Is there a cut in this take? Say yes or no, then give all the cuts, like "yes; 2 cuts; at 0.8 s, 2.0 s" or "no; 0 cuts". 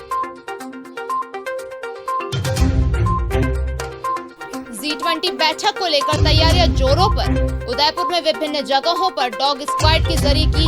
yes; 1 cut; at 4.4 s